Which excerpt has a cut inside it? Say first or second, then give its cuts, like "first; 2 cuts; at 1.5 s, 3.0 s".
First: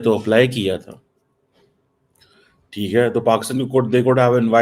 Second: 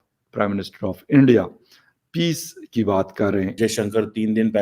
second; 1 cut; at 3.5 s